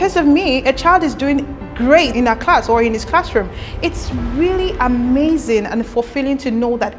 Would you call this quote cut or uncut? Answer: cut